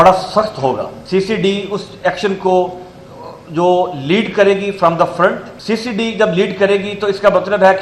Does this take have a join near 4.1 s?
no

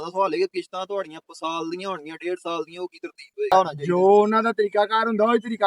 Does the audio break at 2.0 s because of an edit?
no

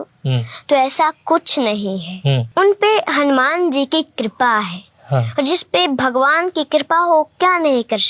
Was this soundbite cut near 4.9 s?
no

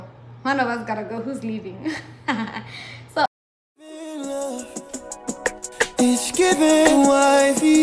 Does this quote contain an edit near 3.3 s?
yes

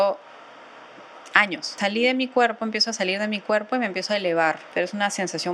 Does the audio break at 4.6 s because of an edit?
yes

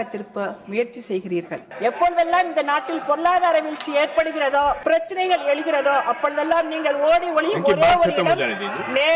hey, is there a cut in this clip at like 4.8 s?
yes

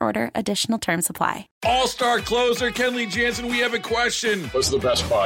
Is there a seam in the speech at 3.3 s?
no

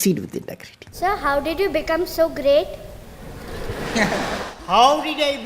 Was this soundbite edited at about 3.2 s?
no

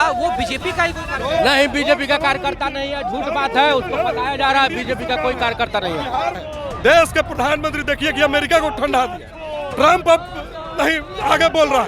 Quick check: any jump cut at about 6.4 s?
yes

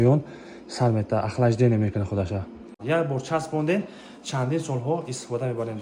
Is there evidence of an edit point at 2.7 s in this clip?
yes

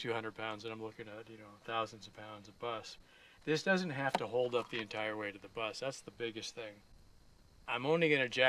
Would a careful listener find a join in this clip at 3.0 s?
yes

